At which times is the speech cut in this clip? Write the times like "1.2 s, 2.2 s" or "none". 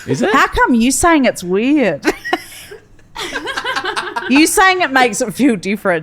none